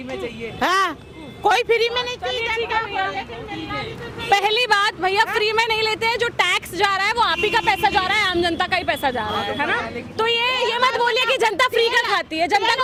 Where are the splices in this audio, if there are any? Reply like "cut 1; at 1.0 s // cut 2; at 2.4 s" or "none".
none